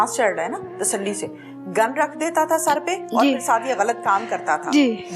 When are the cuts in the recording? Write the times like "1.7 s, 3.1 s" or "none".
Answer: none